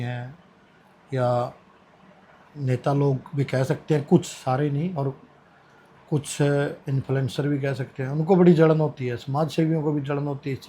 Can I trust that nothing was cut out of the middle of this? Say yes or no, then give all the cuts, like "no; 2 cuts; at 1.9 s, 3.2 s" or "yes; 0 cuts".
yes; 0 cuts